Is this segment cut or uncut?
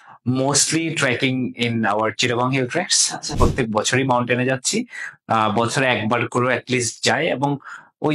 cut